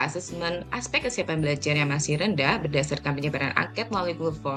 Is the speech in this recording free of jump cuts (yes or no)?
yes